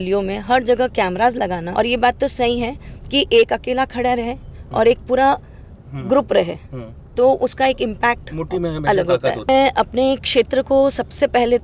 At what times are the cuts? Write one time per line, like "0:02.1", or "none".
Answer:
0:01.6
0:09.5